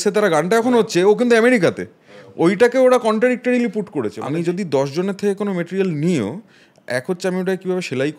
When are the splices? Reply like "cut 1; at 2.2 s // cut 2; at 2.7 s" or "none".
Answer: cut 1; at 4.2 s